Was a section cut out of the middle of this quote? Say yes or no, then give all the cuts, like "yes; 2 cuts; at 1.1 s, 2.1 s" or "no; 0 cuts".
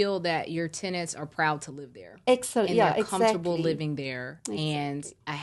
no; 0 cuts